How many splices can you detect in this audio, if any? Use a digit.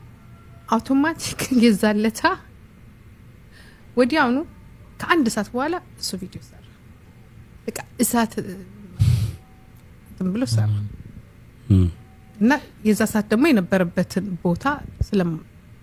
0